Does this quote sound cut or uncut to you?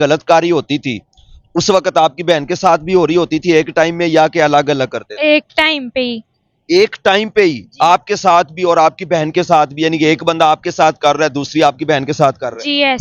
uncut